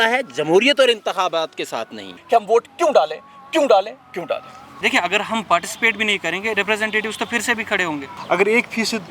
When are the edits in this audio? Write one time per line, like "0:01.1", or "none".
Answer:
0:02.1
0:04.7
0:08.1